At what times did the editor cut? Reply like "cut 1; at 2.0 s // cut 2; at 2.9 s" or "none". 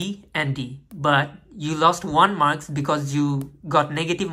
none